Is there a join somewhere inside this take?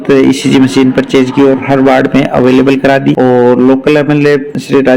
yes; 1 cut; at 3.2 s

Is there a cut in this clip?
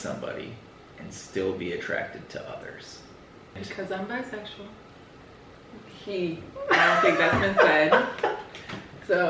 yes; 1 cut; at 3.6 s

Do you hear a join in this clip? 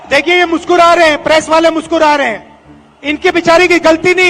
no; 0 cuts

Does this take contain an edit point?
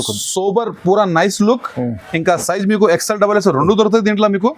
no; 0 cuts

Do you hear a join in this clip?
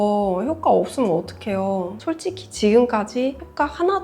yes; 1 cut; at 2.0 s

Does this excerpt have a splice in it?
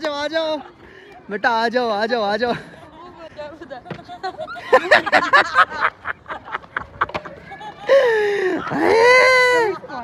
no; 0 cuts

